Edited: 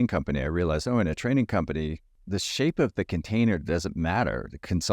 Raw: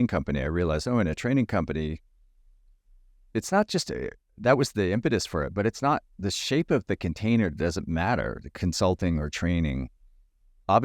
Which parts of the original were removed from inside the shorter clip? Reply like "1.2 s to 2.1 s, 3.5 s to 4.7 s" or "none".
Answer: 2.2 s to 6.1 s